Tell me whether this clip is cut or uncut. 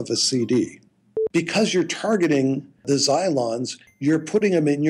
cut